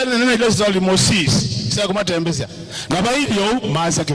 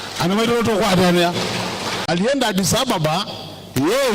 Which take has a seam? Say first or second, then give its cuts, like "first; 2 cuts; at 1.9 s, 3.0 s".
second; 1 cut; at 1.9 s